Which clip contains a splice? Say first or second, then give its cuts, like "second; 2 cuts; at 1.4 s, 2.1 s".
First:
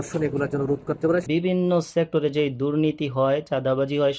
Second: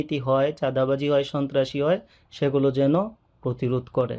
first; 1 cut; at 1.3 s